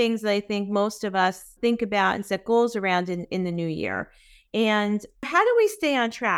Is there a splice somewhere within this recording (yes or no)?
yes